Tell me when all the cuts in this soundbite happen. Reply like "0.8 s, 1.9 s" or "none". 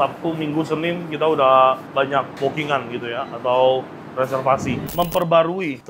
4.9 s

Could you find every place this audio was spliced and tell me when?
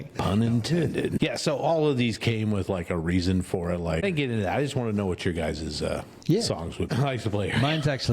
1.2 s, 4.0 s, 6.9 s

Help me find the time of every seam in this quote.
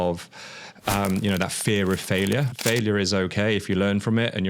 2.5 s

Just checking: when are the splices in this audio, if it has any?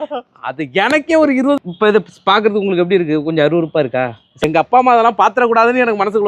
1.6 s, 4.4 s

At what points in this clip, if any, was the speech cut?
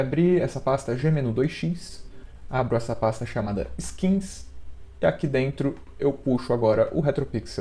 none

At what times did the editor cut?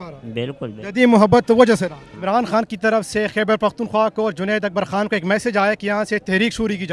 2.1 s

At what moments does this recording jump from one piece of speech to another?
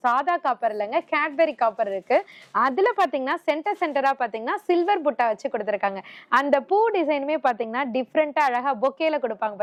none

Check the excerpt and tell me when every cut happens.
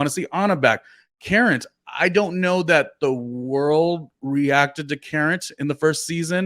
1.2 s

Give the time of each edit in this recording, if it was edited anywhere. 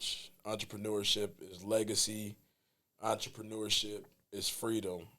none

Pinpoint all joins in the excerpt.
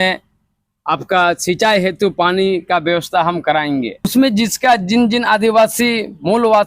4.1 s

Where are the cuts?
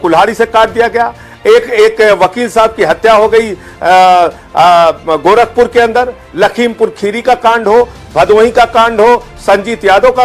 none

